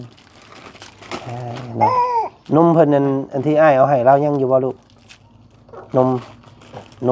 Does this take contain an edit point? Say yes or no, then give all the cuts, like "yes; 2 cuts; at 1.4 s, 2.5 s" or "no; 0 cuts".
no; 0 cuts